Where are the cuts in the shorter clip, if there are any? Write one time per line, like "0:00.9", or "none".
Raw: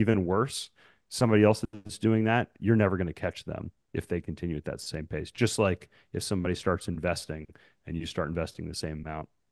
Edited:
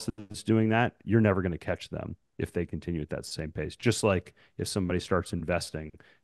none

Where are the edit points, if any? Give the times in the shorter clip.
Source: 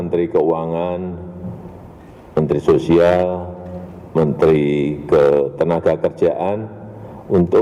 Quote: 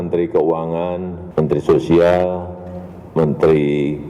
0:01.2

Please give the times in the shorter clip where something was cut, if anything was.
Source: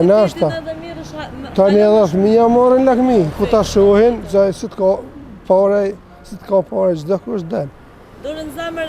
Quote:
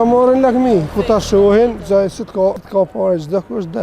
0:02.6

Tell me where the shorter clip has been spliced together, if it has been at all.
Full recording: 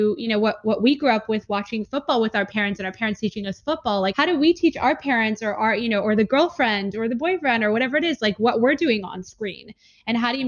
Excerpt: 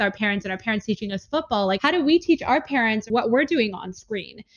0:03.1

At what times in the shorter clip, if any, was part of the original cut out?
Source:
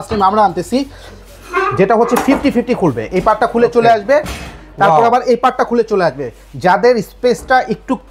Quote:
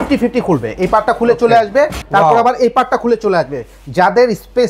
0:02.0

